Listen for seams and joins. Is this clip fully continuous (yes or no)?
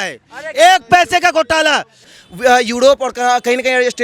no